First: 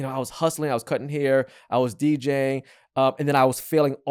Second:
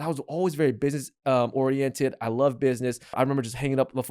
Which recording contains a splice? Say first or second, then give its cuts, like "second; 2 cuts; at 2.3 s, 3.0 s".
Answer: second; 1 cut; at 3.1 s